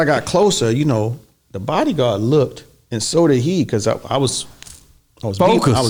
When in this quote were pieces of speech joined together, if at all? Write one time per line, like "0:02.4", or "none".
none